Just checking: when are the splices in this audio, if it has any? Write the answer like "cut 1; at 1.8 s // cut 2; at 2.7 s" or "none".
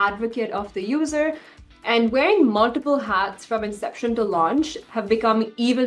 none